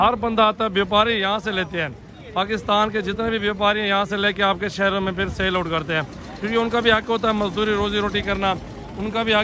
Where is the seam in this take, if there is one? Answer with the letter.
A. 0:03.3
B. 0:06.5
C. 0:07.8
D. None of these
D